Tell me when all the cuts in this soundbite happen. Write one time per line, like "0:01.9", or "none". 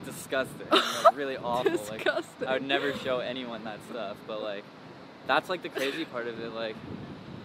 none